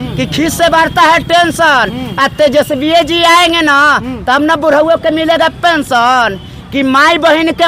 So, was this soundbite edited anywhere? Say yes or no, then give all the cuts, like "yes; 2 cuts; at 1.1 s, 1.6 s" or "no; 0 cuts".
no; 0 cuts